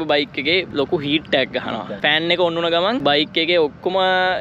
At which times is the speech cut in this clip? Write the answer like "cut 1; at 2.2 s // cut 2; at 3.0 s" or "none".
cut 1; at 2.0 s